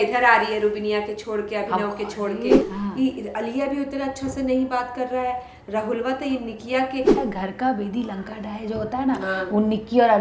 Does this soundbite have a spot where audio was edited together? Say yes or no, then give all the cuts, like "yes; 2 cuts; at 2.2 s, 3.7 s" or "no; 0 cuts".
yes; 2 cuts; at 2.6 s, 7.2 s